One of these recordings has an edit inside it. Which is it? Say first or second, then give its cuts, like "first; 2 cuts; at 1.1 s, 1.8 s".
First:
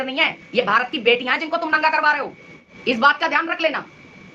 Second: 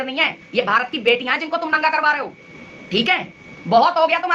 first; 1 cut; at 2.7 s